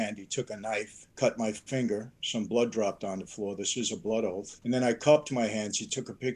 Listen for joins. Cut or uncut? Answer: cut